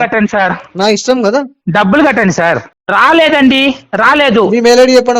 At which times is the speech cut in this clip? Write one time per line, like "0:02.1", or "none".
0:02.7